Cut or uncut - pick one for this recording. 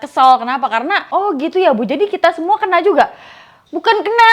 cut